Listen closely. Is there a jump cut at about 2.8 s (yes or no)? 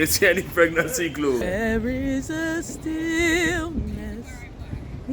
no